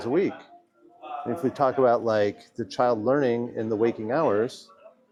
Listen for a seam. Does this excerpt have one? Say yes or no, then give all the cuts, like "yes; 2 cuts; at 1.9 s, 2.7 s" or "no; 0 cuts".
no; 0 cuts